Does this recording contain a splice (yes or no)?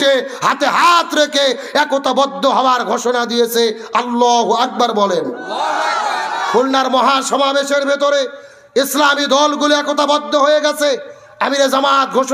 no